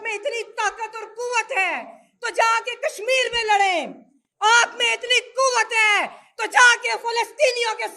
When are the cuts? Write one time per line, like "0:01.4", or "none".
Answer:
none